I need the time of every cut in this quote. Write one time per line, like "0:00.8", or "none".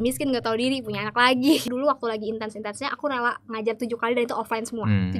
0:01.6